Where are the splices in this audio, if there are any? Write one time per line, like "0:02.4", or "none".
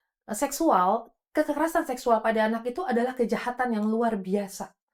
none

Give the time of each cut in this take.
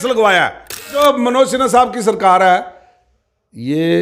0:00.9

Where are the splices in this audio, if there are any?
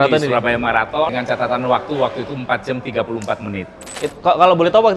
0:01.1
0:03.9

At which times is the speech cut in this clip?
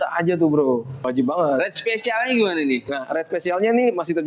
0:01.0

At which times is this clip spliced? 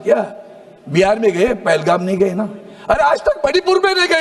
none

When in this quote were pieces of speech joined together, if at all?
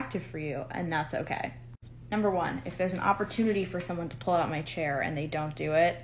0:02.7

